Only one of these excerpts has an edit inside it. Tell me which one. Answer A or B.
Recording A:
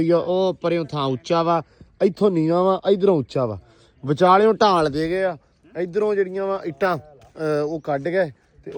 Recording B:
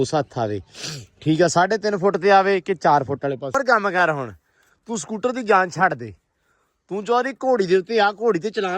B